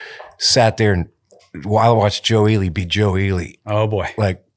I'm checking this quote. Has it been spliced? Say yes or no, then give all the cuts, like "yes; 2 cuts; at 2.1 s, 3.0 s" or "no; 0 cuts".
no; 0 cuts